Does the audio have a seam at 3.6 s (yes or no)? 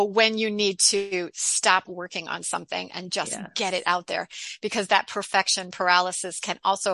no